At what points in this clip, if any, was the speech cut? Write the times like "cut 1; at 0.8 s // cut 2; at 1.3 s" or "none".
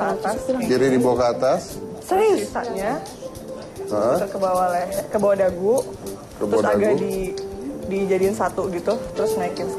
none